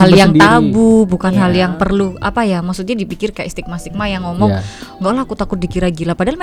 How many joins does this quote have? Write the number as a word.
zero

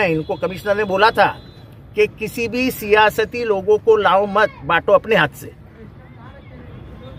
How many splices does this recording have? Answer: zero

